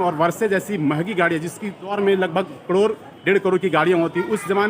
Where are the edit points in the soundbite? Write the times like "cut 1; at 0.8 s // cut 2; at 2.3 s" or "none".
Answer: cut 1; at 1.9 s